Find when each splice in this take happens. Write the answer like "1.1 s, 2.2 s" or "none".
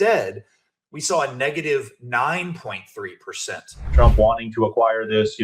3.9 s